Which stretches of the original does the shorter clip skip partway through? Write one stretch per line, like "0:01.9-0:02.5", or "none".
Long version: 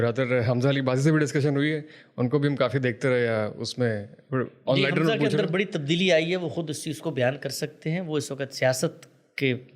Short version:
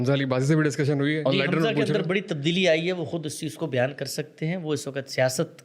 0:01.8-0:04.6